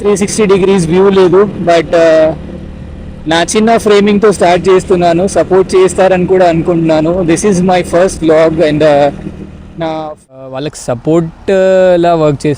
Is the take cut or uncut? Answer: cut